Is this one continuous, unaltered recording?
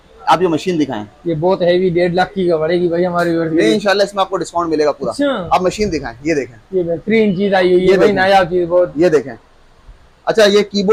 yes; 0 cuts

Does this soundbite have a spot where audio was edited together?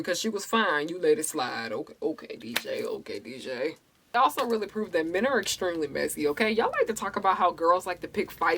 yes; 1 cut; at 4.1 s

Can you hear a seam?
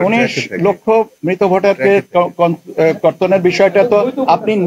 no; 0 cuts

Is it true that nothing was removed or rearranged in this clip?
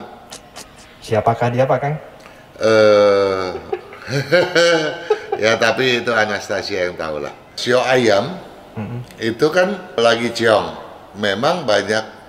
no; 2 cuts; at 7.6 s, 10.0 s

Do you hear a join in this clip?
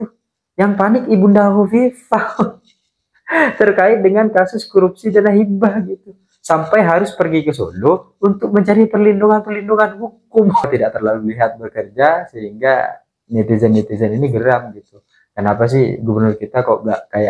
yes; 1 cut; at 10.7 s

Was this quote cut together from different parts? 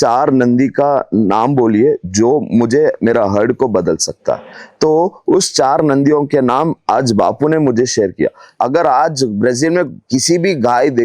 yes; 1 cut; at 8.5 s

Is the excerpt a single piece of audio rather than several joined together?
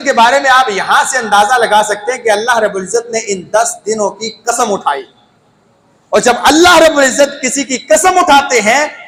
yes; 0 cuts

